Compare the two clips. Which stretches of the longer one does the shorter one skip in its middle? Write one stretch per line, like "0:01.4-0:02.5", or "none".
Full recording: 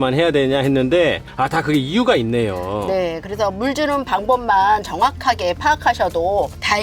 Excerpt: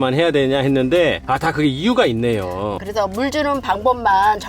0:01.2-0:01.3
0:02.9-0:03.2

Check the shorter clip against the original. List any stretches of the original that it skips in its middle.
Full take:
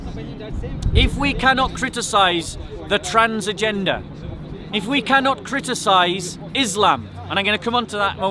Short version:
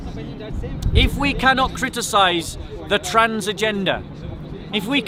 none

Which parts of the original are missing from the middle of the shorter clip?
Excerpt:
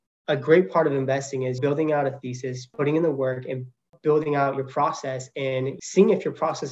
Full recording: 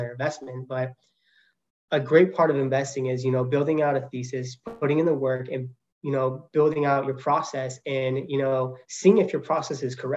0:03.2-0:03.5
0:04.5-0:04.6
0:05.9-0:06.4
0:08.2-0:08.8

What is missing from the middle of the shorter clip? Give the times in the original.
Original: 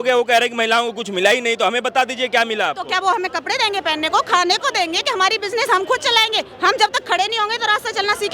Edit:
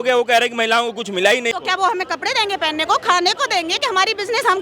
0:01.5-0:02.8

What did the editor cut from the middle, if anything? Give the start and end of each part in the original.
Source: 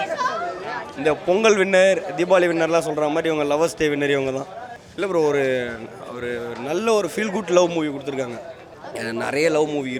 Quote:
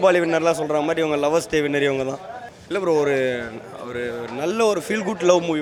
none

